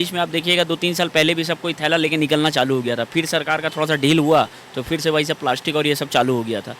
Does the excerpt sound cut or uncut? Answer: uncut